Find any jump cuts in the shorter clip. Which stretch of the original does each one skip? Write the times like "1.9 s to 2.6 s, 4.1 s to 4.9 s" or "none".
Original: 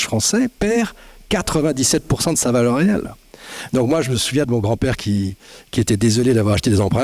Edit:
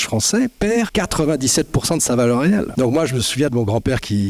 0.9 s to 1.3 s, 3.1 s to 3.7 s